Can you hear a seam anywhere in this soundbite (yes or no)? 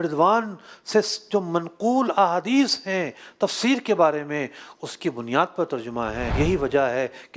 yes